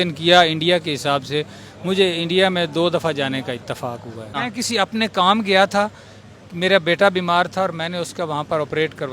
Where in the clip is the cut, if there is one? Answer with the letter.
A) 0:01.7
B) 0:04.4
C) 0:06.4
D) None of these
B